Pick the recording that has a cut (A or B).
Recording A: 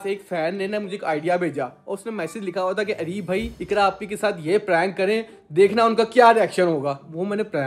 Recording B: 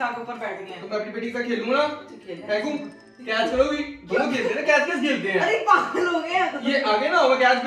A